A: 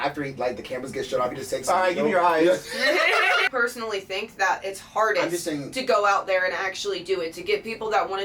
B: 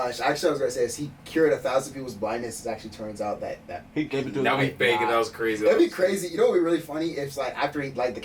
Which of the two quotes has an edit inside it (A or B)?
A